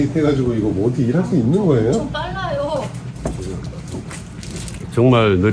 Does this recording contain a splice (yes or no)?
no